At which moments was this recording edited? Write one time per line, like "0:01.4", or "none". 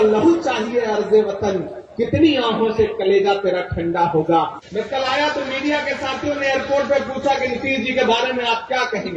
0:04.6